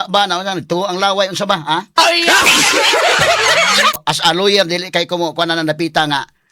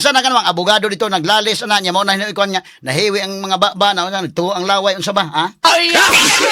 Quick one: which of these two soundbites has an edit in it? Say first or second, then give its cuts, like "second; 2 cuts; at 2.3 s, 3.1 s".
first; 1 cut; at 4.0 s